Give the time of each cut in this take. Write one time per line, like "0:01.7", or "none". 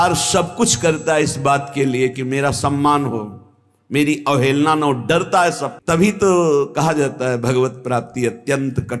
0:05.7